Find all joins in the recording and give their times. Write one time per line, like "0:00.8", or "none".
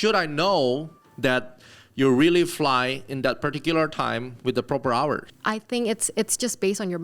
0:05.3

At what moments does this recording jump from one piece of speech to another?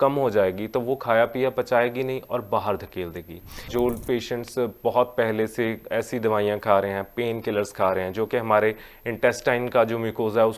0:03.7

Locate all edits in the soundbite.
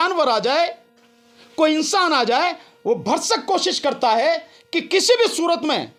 none

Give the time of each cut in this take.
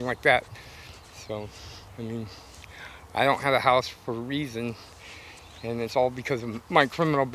none

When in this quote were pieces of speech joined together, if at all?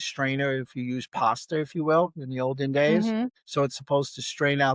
0:03.0

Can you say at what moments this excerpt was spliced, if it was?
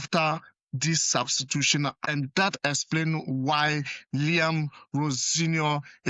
0:02.0

